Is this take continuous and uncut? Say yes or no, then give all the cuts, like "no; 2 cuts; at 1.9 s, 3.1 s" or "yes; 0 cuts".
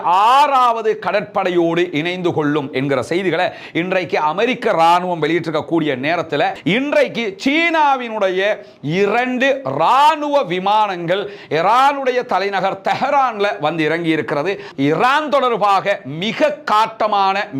no; 2 cuts; at 6.6 s, 14.7 s